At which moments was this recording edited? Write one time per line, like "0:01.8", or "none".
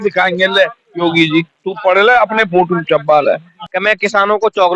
0:03.5

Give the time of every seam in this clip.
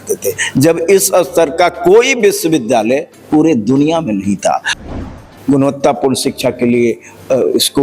0:04.9

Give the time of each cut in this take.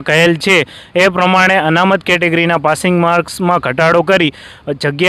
none

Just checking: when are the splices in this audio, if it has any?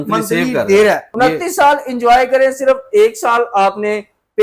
0:01.1

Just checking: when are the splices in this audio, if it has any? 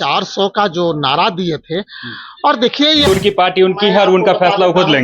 0:03.1

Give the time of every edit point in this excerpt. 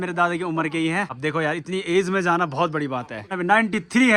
0:01.1
0:03.3

